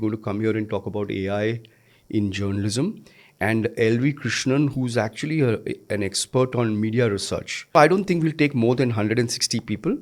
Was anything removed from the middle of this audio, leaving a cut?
yes; 1 cut; at 7.7 s

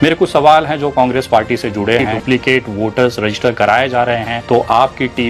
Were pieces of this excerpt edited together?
yes; 2 cuts; at 2.1 s, 4.3 s

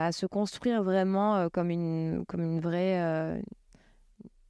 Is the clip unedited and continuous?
yes; 0 cuts

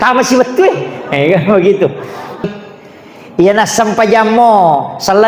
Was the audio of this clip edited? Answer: yes; 1 cut; at 2.5 s

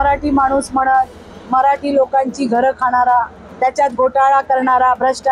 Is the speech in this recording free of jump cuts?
no; 1 cut; at 3.4 s

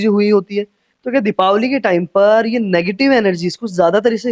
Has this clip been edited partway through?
no; 0 cuts

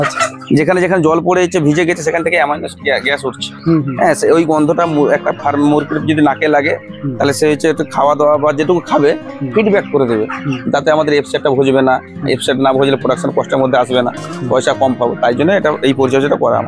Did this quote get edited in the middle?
no; 0 cuts

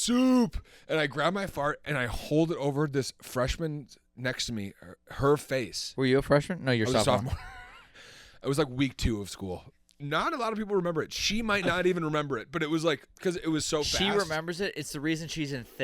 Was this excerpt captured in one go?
no; 1 cut; at 10.0 s

